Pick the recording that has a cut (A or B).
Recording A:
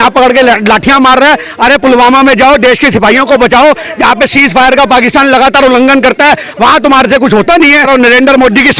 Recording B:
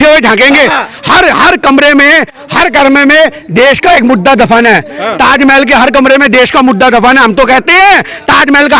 A